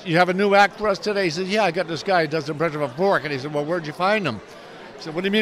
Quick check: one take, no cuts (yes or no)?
yes